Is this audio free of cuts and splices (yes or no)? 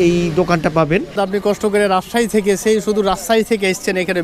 no